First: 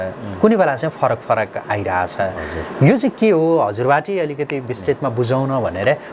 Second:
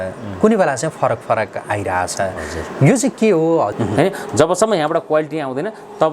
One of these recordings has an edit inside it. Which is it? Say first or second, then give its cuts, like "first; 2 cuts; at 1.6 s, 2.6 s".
second; 1 cut; at 3.7 s